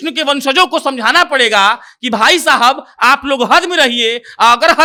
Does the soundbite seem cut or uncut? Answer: uncut